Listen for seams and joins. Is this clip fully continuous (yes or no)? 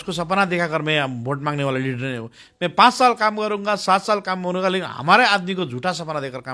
yes